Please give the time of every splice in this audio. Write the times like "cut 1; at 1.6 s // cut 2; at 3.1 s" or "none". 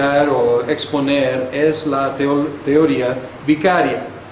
none